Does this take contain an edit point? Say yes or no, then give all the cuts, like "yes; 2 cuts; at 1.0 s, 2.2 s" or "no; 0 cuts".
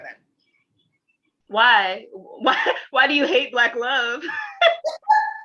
no; 0 cuts